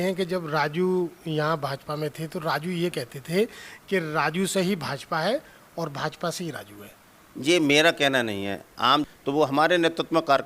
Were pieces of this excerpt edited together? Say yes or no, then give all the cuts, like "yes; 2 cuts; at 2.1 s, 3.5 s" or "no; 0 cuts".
yes; 1 cut; at 9.0 s